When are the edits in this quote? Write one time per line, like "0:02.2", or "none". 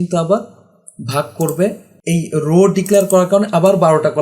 0:01.9